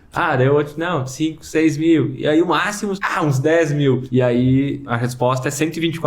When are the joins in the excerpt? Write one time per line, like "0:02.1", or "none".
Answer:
0:03.0
0:04.0
0:04.9